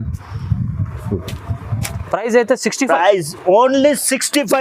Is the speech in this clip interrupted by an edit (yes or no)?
no